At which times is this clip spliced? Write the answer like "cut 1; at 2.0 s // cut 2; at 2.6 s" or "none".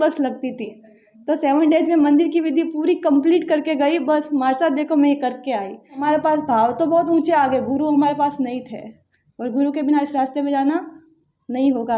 cut 1; at 6.0 s